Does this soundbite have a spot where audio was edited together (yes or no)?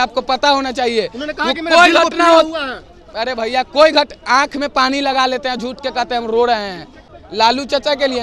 yes